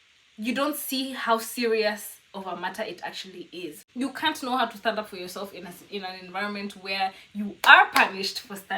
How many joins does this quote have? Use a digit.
1